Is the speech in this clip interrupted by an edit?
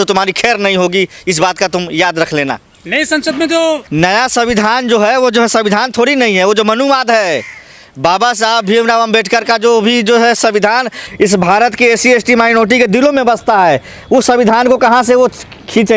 no; 0 cuts

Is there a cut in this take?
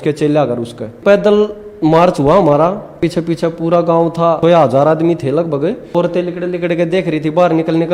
yes; 4 cuts; at 1.0 s, 3.0 s, 4.4 s, 5.9 s

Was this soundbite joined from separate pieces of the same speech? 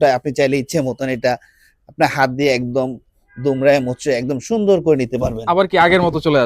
no; 0 cuts

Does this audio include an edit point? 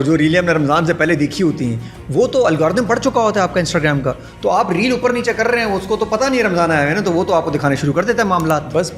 no; 0 cuts

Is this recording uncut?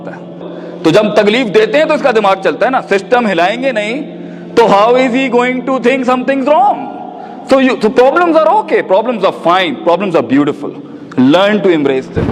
yes; 0 cuts

